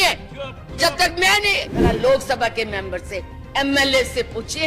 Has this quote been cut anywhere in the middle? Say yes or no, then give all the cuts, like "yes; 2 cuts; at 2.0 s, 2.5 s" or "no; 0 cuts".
yes; 1 cut; at 1.7 s